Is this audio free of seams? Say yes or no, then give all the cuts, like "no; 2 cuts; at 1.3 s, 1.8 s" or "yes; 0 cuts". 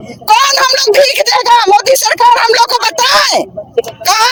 yes; 0 cuts